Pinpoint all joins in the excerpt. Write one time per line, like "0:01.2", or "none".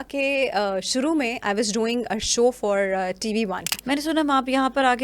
0:03.7